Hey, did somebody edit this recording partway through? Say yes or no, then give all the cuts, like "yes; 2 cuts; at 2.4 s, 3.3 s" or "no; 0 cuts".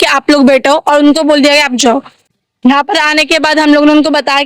yes; 1 cut; at 2.3 s